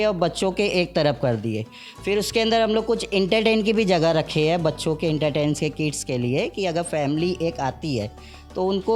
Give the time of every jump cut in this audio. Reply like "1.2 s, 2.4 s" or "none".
none